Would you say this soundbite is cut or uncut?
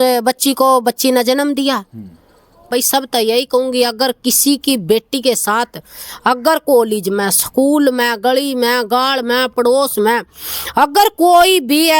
cut